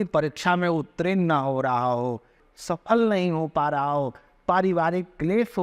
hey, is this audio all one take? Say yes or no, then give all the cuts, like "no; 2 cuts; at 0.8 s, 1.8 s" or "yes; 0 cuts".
no; 1 cut; at 2.4 s